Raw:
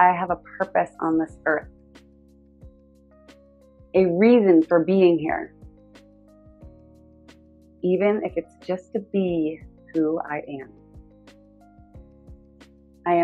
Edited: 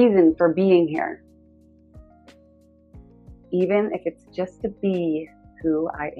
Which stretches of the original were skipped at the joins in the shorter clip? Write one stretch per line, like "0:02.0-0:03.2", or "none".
none

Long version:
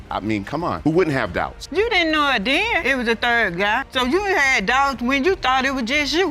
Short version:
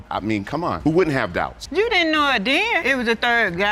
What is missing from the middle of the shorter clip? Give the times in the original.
none

